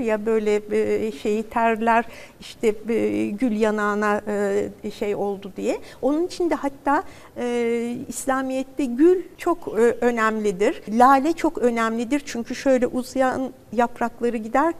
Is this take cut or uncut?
cut